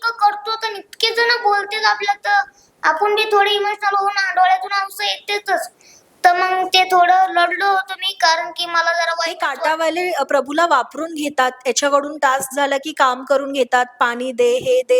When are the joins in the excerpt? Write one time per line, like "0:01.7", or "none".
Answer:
0:09.5